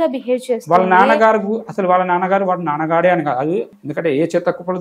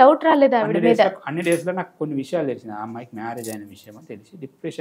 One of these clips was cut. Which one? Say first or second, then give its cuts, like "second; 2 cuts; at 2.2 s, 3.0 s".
first; 1 cut; at 3.8 s